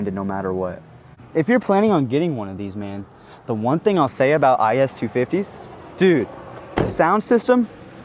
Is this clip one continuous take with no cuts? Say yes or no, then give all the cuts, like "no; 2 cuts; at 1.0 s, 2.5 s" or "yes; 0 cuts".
no; 1 cut; at 1.2 s